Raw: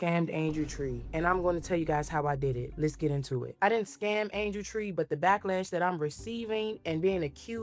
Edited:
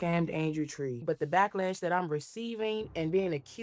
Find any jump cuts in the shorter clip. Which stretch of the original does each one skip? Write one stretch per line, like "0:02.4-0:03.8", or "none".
0:01.0-0:04.9